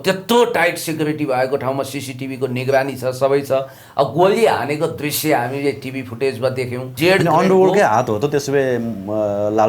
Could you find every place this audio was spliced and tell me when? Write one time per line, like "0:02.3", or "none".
0:06.9